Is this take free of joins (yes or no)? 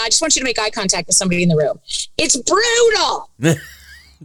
yes